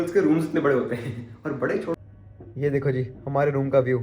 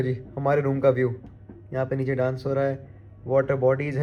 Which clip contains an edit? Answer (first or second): first